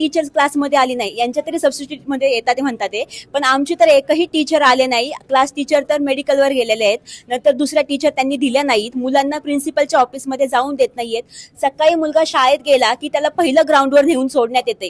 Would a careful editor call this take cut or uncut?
uncut